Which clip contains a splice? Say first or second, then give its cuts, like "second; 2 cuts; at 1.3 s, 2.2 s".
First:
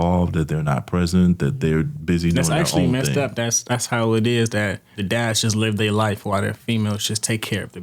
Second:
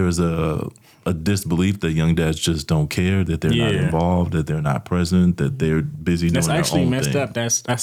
first; 1 cut; at 5.0 s